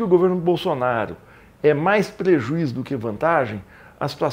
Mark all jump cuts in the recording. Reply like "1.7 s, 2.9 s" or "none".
none